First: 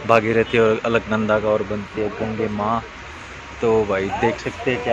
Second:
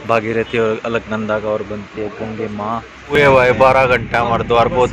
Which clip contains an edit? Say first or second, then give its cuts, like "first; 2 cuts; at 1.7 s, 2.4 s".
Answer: second; 1 cut; at 3.2 s